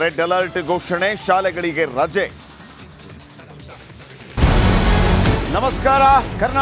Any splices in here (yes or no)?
no